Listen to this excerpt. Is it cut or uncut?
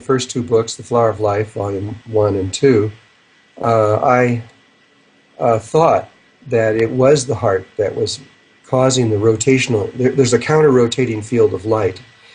uncut